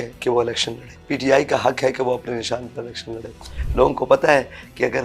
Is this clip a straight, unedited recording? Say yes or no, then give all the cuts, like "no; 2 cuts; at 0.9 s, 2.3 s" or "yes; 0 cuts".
no; 2 cuts; at 0.9 s, 3.5 s